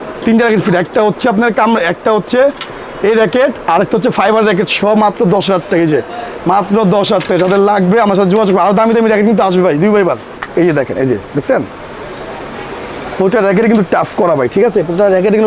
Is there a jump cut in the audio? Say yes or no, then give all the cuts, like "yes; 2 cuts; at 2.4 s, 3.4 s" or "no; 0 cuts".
yes; 1 cut; at 10.5 s